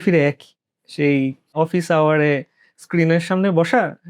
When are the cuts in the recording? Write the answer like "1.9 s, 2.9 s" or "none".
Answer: 1.5 s

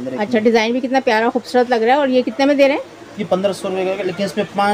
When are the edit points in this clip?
none

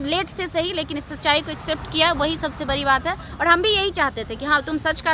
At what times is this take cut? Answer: none

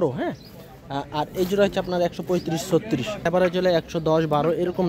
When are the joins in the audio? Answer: 3.2 s

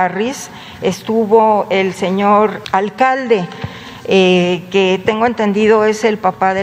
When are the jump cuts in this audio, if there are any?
2.6 s

